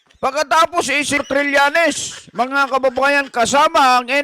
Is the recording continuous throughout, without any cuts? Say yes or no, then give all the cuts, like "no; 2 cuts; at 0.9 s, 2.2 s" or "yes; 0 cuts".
no; 1 cut; at 1.2 s